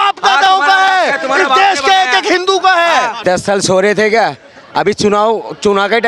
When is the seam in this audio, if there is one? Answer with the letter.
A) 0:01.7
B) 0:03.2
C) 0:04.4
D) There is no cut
B